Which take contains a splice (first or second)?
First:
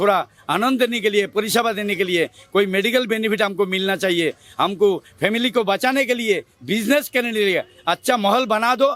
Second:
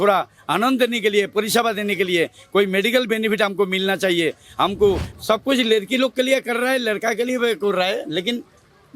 second